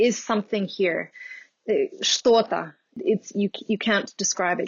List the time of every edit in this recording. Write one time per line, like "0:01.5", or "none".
0:03.0